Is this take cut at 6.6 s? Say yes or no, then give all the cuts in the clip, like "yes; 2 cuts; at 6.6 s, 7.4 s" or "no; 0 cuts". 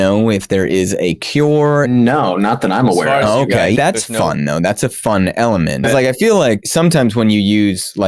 yes; 4 cuts; at 1.9 s, 3.8 s, 5.8 s, 6.6 s